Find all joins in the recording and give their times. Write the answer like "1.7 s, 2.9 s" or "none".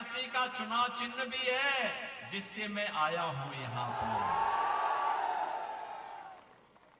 none